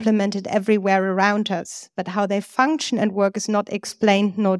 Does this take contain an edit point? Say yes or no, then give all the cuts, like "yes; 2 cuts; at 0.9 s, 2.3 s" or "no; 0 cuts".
no; 0 cuts